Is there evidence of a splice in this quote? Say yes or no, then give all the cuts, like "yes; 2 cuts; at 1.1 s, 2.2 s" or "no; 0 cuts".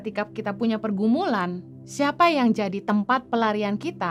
no; 0 cuts